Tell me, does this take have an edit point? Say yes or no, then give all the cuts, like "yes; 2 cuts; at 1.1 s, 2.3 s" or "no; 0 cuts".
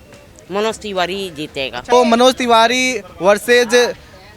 yes; 1 cut; at 1.9 s